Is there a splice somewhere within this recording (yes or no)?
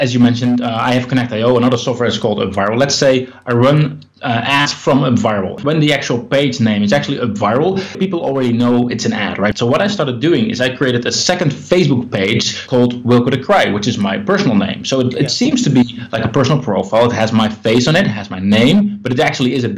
yes